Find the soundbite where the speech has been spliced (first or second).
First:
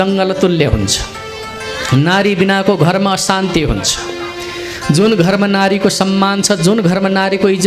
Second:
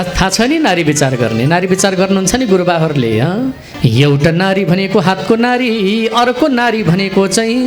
second